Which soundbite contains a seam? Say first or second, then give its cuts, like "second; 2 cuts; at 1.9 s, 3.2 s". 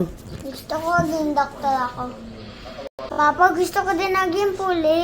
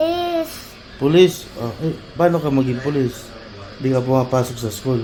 first; 1 cut; at 2.9 s